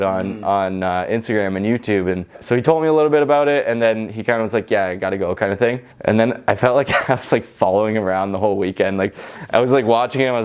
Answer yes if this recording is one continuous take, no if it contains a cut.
no